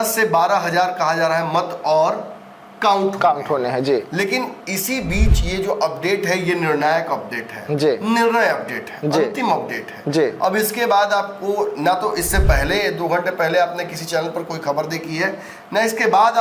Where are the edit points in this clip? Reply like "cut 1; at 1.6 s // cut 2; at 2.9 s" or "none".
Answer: none